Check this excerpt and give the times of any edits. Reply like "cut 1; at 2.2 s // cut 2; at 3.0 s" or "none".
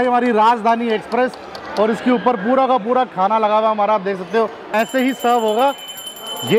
cut 1; at 4.7 s